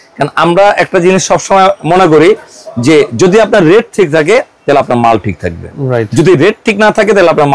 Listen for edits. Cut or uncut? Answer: uncut